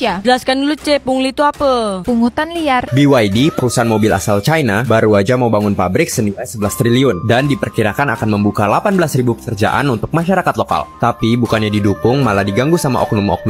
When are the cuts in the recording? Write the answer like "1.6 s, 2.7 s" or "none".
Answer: 2.9 s